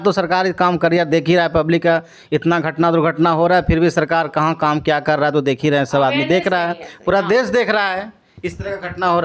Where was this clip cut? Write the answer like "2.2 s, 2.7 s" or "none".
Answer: none